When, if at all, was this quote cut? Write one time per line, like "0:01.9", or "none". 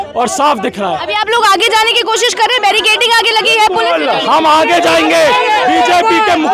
none